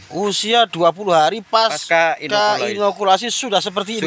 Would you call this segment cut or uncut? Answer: uncut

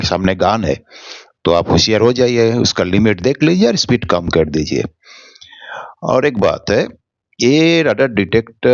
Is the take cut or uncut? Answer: uncut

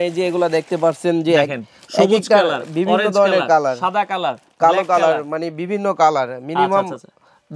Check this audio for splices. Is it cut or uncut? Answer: uncut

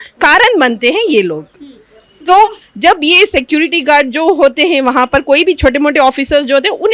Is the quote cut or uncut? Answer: uncut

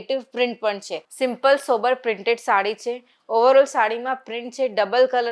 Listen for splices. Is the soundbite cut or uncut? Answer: cut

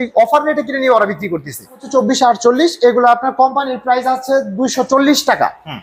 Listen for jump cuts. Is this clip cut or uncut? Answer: cut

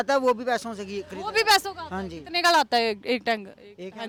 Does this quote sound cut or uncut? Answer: uncut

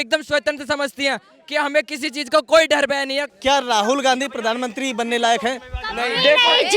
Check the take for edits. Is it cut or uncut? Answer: cut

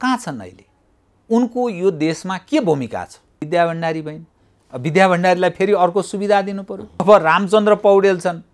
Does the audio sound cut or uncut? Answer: cut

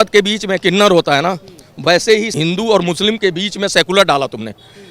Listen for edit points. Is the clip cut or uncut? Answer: cut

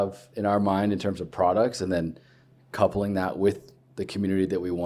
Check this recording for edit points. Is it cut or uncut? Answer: uncut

